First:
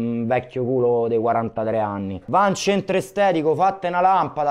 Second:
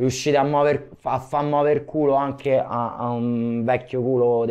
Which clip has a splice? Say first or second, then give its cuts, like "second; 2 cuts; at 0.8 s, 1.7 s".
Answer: first; 1 cut; at 2.1 s